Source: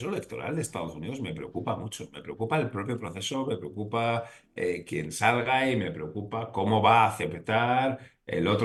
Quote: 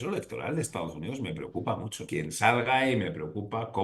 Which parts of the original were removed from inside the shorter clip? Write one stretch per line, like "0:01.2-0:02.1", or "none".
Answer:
0:02.0-0:04.8